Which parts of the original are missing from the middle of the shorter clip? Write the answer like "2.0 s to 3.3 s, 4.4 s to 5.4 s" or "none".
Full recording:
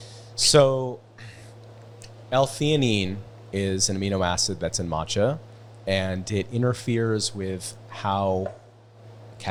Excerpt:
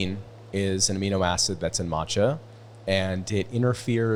none